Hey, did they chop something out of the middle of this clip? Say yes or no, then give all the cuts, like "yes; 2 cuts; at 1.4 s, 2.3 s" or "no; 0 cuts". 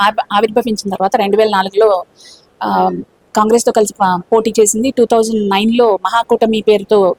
no; 0 cuts